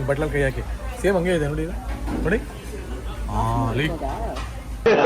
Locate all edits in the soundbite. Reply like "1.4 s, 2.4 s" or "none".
none